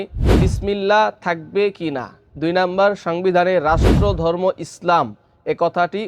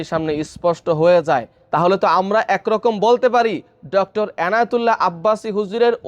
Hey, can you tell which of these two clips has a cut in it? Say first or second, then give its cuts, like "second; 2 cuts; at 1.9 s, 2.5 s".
second; 1 cut; at 1.6 s